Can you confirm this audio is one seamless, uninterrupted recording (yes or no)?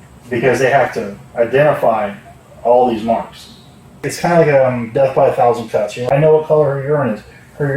no